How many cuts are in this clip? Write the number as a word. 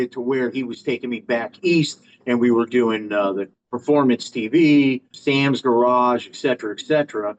two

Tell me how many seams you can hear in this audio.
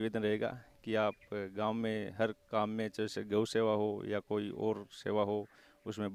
zero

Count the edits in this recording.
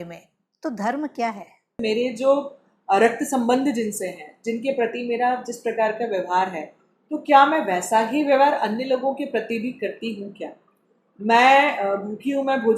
one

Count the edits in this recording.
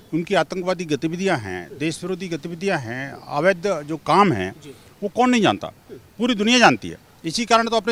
zero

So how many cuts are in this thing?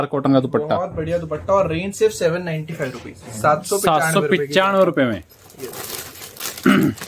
zero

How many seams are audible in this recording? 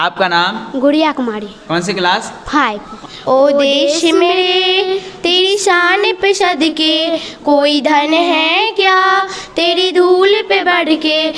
one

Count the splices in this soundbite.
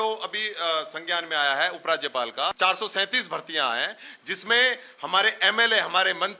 one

